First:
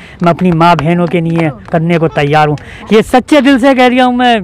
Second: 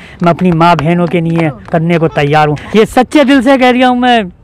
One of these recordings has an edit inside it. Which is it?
second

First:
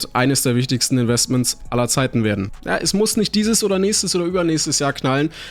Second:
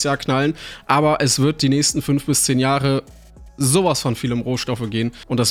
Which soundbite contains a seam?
first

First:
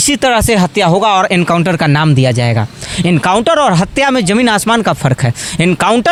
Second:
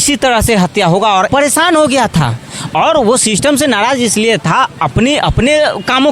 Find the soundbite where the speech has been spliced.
second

